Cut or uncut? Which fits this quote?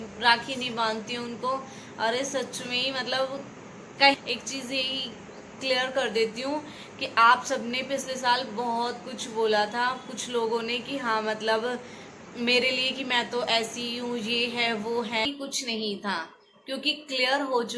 cut